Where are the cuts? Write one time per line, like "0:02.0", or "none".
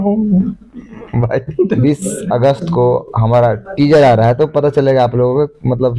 0:01.8